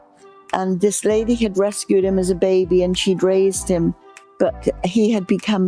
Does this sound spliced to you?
no; 0 cuts

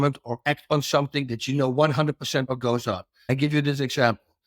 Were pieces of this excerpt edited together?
yes; 1 cut; at 3.1 s

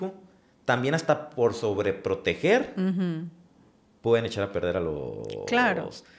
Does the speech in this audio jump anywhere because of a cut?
no; 0 cuts

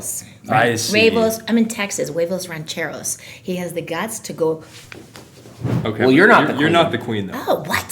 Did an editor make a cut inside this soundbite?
yes; 1 cut; at 5.6 s

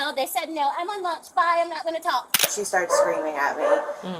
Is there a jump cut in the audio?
yes; 1 cut; at 2.4 s

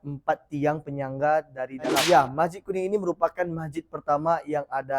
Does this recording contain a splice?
yes; 1 cut; at 2.0 s

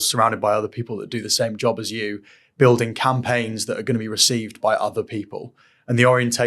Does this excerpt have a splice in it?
no; 0 cuts

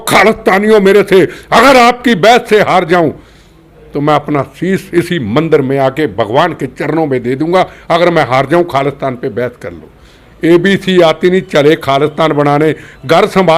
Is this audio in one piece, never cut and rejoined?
yes; 0 cuts

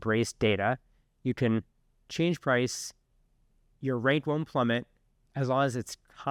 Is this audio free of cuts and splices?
yes; 0 cuts

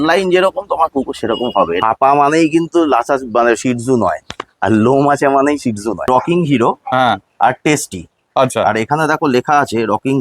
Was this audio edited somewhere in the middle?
yes; 2 cuts; at 1.8 s, 6.1 s

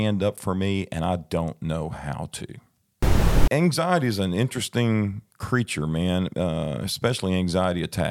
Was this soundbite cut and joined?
yes; 1 cut; at 3.3 s

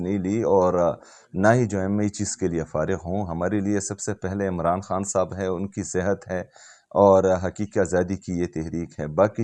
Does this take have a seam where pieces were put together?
no; 0 cuts

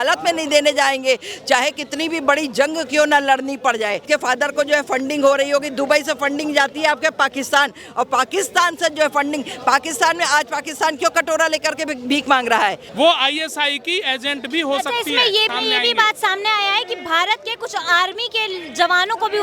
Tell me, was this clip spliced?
yes; 3 cuts; at 4.0 s, 12.8 s, 15.5 s

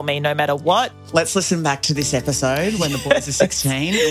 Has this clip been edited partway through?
yes; 1 cut; at 1.0 s

